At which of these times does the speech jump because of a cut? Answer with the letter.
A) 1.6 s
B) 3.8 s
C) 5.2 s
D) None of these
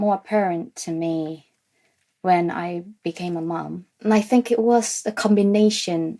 B